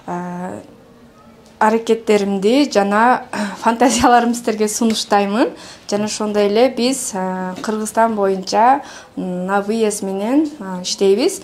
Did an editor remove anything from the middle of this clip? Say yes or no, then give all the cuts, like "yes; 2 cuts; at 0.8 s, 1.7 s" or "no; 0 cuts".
no; 0 cuts